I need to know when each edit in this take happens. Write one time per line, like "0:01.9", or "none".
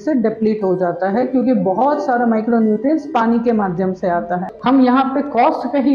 0:04.5